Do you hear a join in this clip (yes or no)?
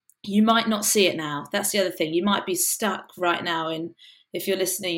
no